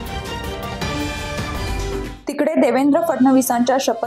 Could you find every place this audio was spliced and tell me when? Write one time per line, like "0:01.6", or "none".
none